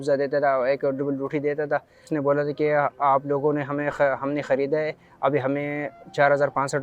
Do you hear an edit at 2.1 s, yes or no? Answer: yes